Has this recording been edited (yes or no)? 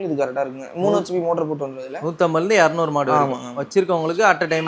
no